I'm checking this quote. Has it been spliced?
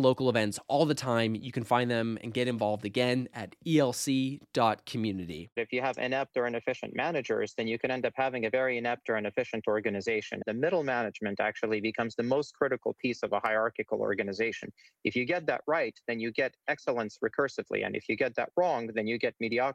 yes; 2 cuts; at 5.6 s, 10.5 s

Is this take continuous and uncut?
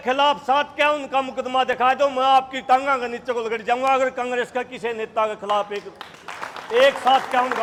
yes; 0 cuts

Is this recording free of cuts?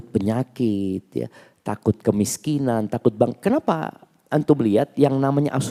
yes; 0 cuts

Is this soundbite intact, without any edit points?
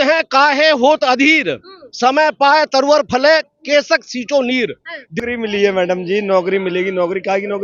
no; 1 cut; at 5.1 s

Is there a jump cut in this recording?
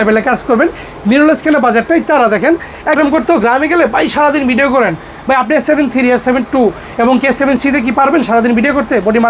yes; 1 cut; at 3.0 s

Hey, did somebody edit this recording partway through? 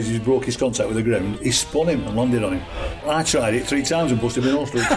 yes; 1 cut; at 3.0 s

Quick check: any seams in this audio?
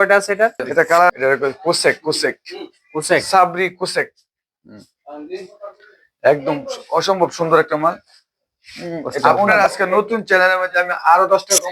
yes; 2 cuts; at 1.1 s, 9.5 s

